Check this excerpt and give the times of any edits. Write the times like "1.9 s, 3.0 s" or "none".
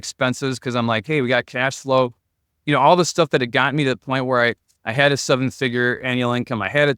none